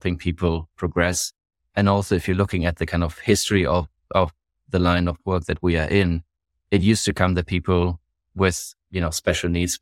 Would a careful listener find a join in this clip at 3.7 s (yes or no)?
no